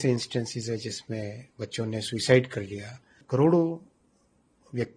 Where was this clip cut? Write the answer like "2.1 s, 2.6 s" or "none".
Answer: 3.1 s